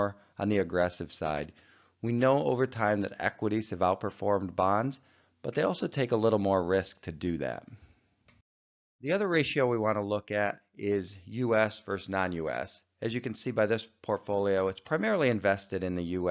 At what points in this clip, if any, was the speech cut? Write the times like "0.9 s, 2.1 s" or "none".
5.9 s